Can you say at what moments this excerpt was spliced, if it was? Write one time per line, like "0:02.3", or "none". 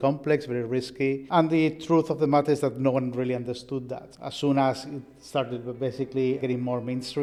none